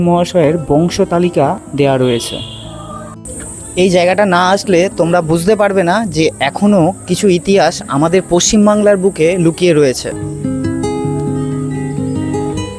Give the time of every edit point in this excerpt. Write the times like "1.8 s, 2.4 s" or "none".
1.6 s, 3.2 s, 10.1 s